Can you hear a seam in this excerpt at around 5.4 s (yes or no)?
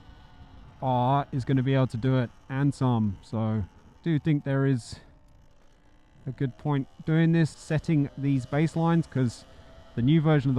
no